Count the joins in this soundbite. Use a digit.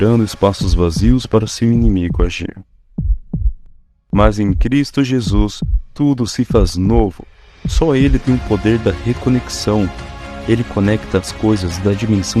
1